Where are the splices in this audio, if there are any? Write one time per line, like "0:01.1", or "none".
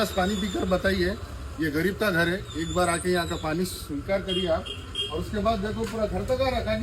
none